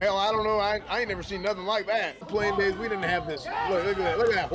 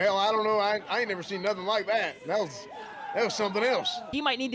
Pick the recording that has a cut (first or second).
first